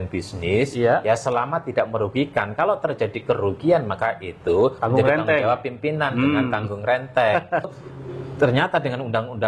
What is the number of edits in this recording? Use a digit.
1